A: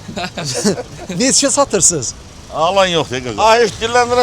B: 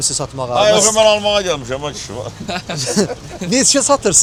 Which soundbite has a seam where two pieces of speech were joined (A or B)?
A